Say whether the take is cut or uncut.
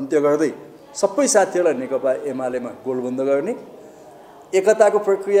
uncut